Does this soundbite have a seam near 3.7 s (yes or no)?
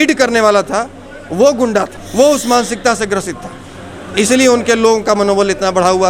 no